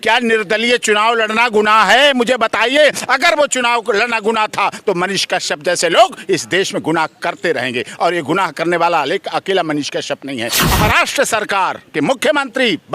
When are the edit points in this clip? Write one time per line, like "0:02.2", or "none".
0:10.7